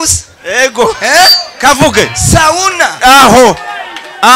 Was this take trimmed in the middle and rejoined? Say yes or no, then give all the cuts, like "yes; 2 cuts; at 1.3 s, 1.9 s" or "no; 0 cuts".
no; 0 cuts